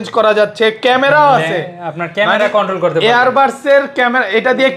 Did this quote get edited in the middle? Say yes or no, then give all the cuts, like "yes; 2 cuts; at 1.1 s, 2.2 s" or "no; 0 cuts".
no; 0 cuts